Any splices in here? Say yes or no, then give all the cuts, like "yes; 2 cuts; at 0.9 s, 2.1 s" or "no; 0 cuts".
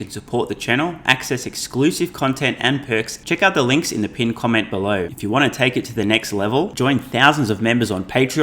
yes; 2 cuts; at 3.2 s, 5.1 s